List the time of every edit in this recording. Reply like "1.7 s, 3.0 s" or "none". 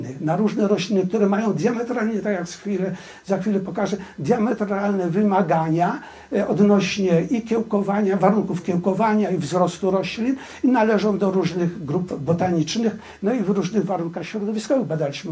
none